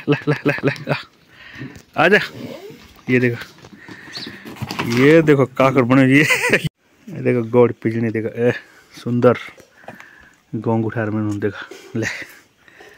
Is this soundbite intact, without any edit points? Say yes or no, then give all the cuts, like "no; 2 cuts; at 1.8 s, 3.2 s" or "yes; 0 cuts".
no; 1 cut; at 6.6 s